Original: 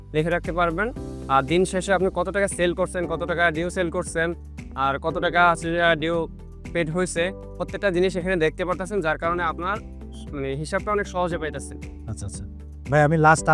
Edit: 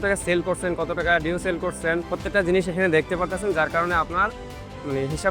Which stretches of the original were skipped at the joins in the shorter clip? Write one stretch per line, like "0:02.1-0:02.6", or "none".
0:04.4-0:07.6

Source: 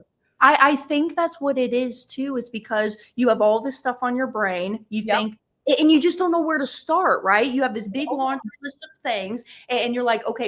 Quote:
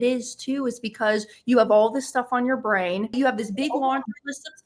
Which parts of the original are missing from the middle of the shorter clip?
0:04.8-0:07.5

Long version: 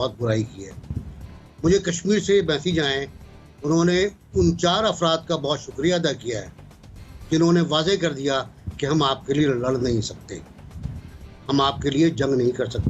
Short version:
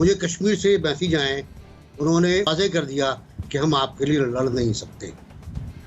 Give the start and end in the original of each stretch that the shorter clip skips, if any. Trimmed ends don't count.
0:04.1-0:07.8

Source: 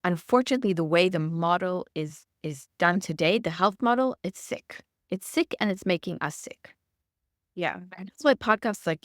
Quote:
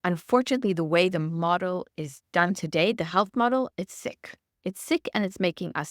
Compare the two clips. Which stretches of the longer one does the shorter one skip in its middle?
0:01.9-0:02.3

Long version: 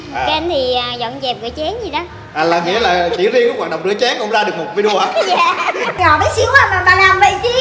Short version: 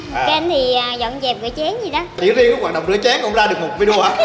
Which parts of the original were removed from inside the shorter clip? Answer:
0:02.2-0:03.1

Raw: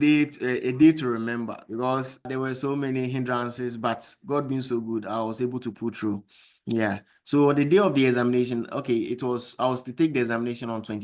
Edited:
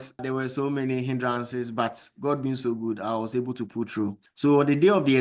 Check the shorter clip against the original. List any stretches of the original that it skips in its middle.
0:06.3-0:07.1

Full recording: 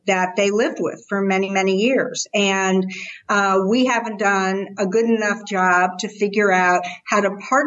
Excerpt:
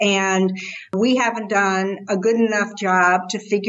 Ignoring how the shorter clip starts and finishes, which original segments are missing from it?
0:03.3-0:03.6

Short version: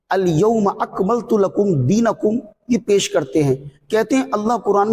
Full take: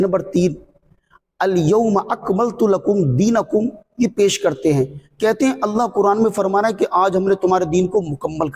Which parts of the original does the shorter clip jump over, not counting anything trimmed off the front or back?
none

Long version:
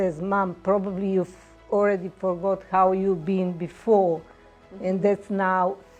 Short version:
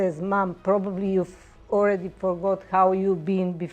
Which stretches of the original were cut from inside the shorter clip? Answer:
none

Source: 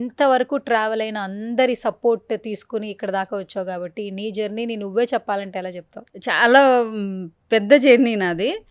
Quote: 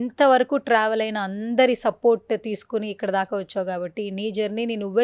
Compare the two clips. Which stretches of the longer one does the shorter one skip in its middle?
none

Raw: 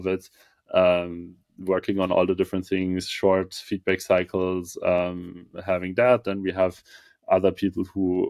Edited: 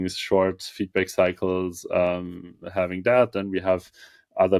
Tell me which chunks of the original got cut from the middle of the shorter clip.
none

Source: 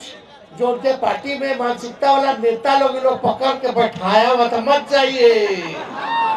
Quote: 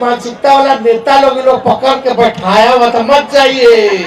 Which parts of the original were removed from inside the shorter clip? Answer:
none

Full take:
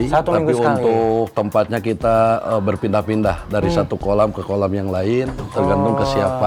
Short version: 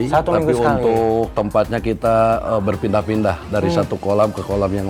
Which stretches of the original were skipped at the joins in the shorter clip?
none

